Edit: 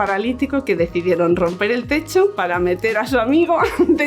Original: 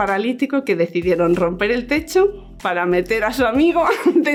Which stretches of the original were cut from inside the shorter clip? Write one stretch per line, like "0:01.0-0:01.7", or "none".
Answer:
0:02.4-0:02.7